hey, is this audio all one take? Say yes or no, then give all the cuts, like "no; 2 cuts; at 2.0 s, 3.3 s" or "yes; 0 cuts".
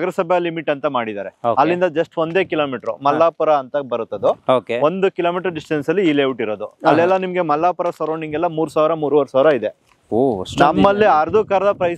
yes; 0 cuts